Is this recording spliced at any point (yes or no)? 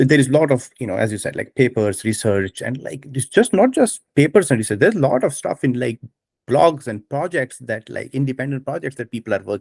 no